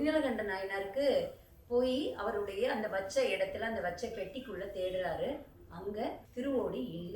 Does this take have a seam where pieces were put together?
yes; 1 cut; at 6.2 s

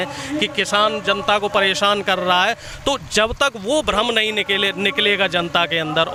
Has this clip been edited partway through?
no; 0 cuts

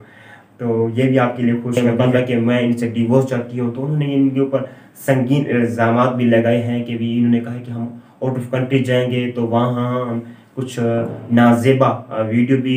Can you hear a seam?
yes; 1 cut; at 1.8 s

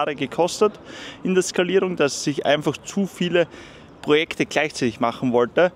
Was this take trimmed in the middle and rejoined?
no; 0 cuts

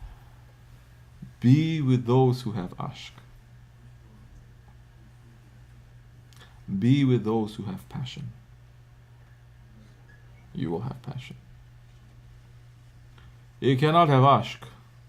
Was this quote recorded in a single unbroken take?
yes; 0 cuts

